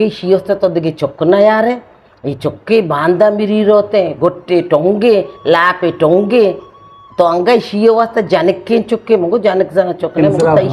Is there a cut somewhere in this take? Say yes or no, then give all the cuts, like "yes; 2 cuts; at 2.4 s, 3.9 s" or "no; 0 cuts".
no; 0 cuts